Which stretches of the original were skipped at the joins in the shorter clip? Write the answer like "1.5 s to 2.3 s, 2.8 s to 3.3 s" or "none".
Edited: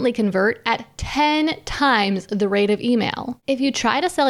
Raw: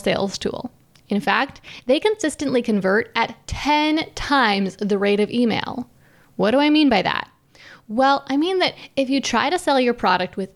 5.8 s to 8.8 s